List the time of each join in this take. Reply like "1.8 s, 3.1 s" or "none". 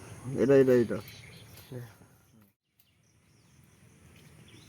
2.2 s